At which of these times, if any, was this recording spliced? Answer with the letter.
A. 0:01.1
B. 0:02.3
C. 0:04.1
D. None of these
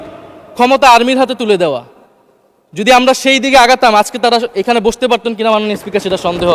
D